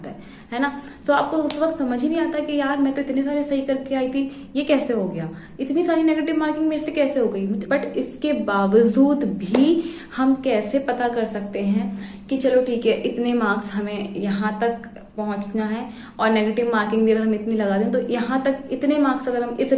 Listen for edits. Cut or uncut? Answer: cut